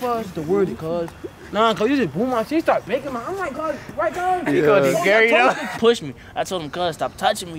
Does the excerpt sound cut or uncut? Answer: cut